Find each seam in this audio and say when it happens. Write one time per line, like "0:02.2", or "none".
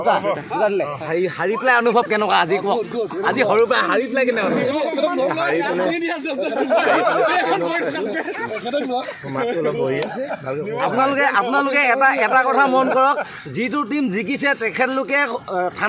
0:01.0